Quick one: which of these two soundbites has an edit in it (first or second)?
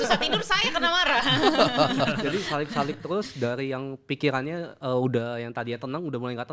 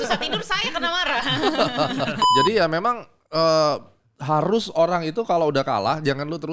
second